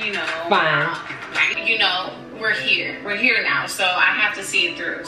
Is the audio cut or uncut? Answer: cut